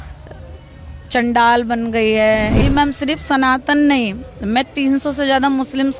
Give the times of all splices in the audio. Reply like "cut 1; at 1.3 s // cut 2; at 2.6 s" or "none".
cut 1; at 2.6 s